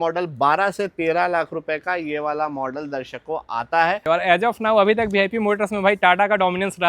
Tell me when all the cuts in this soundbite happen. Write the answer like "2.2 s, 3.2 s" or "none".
4.0 s